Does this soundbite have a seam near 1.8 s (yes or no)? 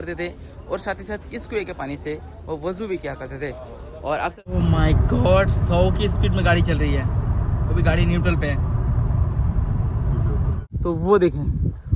no